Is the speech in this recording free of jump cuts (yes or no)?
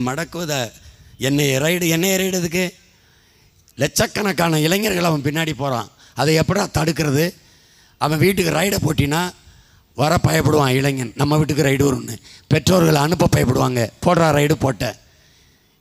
yes